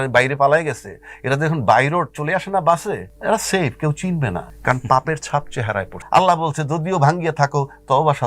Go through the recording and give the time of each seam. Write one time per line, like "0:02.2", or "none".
0:03.1
0:04.5
0:06.0